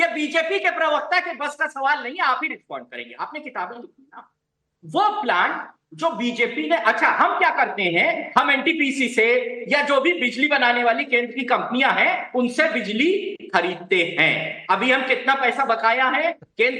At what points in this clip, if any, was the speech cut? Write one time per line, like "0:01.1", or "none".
0:14.1